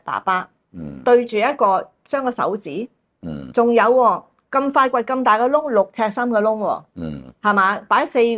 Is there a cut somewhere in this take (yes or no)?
no